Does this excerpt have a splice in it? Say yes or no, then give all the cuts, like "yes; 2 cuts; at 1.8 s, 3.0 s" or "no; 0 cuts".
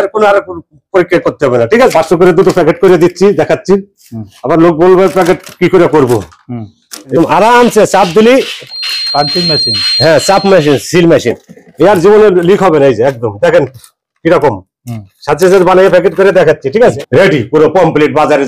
yes; 3 cuts; at 1.9 s, 7.2 s, 17.0 s